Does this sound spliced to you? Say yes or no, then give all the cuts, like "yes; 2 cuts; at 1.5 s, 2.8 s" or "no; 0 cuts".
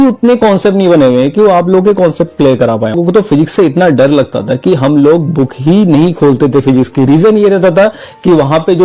yes; 1 cut; at 3.0 s